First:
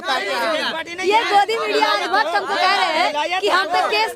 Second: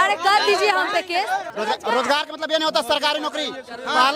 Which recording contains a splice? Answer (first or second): second